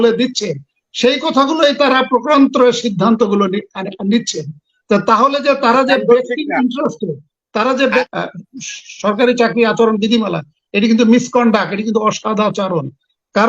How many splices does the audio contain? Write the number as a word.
one